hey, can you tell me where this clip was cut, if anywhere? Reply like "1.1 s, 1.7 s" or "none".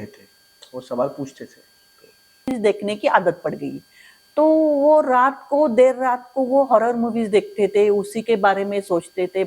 2.5 s